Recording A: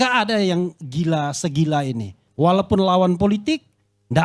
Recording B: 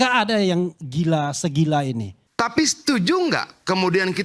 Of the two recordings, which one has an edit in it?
B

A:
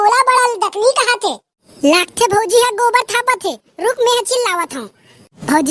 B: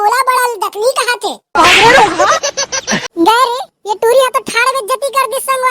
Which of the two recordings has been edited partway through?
A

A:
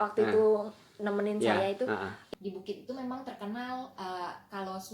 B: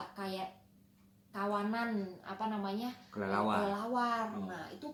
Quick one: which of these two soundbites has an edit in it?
A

